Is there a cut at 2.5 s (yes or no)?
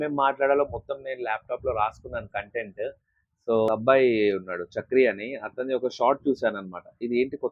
no